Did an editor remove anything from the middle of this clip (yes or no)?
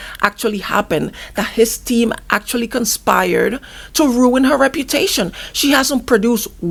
no